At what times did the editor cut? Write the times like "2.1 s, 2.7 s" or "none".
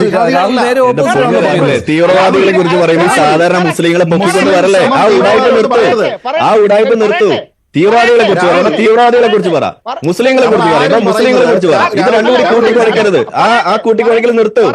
none